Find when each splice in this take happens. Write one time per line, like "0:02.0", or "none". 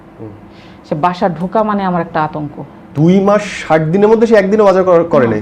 0:02.9